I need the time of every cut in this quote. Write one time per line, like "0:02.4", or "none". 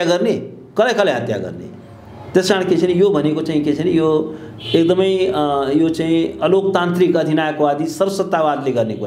none